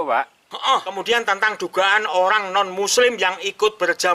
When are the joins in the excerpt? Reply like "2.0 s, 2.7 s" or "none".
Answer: 0.9 s